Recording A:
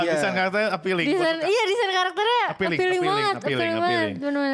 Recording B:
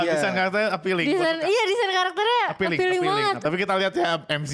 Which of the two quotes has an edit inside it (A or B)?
B